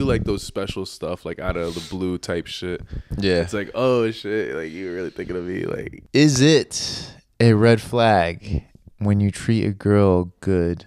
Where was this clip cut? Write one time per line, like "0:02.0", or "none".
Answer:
0:06.0